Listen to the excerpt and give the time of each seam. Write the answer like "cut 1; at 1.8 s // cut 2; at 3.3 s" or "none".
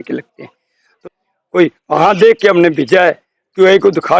cut 1; at 0.9 s

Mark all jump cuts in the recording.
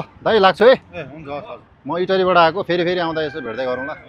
none

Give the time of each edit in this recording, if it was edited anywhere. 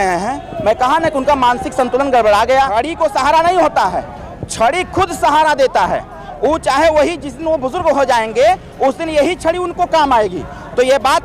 cut 1; at 2.7 s

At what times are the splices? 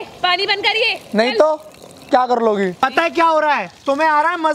none

